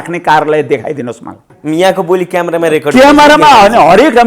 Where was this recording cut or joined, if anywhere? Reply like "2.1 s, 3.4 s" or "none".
1.5 s